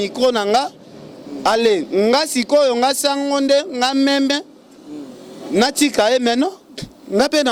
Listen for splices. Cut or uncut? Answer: uncut